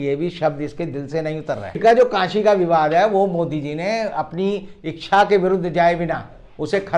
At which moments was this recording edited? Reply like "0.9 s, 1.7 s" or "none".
1.8 s